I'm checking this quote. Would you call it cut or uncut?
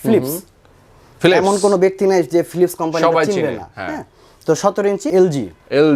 cut